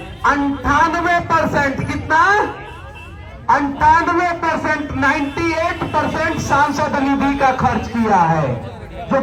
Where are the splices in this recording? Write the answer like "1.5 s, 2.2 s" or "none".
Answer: none